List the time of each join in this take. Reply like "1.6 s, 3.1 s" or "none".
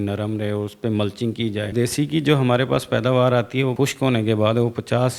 1.7 s, 3.7 s